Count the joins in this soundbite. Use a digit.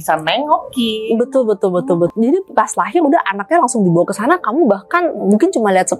1